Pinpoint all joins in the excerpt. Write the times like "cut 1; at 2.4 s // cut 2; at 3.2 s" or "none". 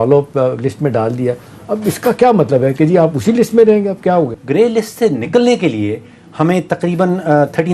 cut 1; at 4.4 s